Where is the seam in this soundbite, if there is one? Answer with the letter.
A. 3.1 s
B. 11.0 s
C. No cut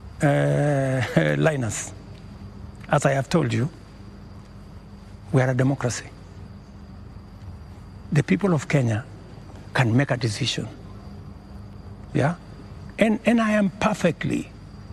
C